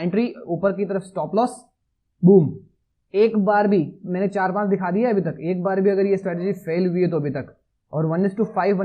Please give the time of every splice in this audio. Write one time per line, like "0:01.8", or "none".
none